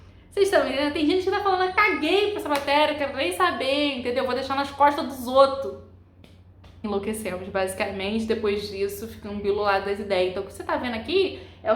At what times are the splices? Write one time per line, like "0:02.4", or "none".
0:06.8